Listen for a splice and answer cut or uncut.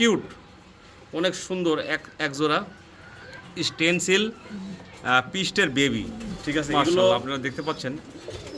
cut